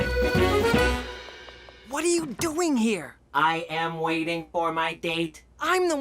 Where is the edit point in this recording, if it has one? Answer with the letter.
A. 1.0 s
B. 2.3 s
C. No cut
A